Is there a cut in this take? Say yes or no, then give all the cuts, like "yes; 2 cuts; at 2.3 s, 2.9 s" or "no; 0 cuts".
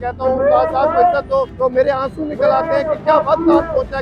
yes; 1 cut; at 1.5 s